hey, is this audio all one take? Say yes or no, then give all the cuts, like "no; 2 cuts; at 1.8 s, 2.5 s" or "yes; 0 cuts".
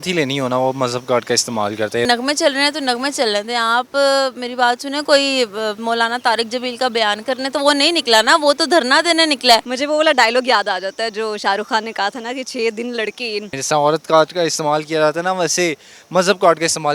no; 3 cuts; at 2.1 s, 9.7 s, 13.5 s